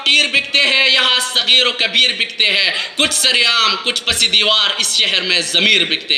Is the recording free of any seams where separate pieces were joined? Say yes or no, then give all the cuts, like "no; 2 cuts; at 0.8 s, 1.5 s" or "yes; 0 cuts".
yes; 0 cuts